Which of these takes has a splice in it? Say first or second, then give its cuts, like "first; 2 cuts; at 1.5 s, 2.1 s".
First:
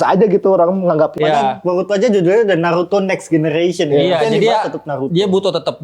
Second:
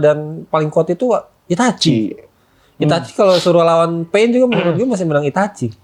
first; 1 cut; at 1.1 s